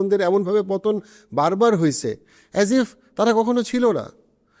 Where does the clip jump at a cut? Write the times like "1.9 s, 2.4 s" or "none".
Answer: none